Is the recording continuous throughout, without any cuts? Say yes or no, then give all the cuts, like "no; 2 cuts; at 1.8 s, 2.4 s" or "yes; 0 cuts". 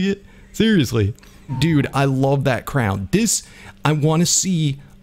no; 1 cut; at 1.5 s